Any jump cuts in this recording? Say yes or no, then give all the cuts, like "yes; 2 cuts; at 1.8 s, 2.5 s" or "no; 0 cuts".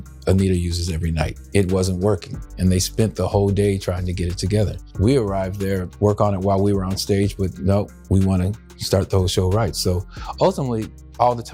no; 0 cuts